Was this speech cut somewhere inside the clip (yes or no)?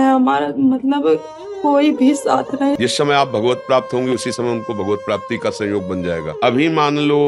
yes